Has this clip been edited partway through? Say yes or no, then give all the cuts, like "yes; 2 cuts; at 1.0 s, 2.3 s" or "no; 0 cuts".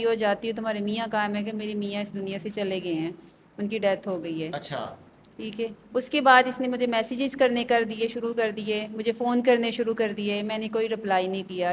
no; 0 cuts